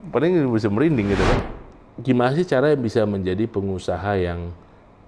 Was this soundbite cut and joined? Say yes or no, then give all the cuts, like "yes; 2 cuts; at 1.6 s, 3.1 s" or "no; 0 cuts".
yes; 1 cut; at 1.4 s